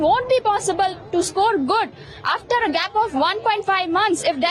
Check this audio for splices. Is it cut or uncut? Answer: uncut